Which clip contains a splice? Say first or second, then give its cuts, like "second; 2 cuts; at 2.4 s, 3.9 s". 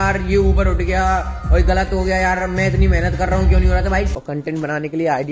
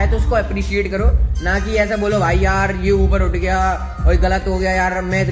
first; 1 cut; at 4.1 s